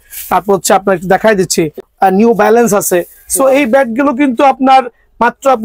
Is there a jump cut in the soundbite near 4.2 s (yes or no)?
no